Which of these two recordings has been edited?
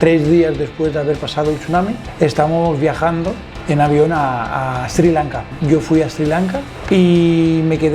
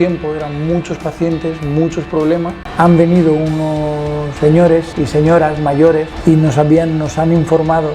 second; 1 cut; at 2.6 s

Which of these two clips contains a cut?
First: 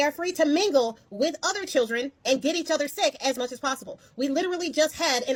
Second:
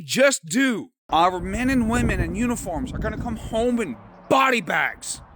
second; 1 cut; at 0.9 s

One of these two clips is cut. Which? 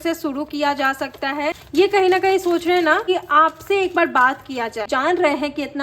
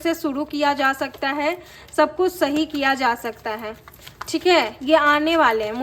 first; 3 cuts; at 1.6 s, 3.1 s, 4.9 s

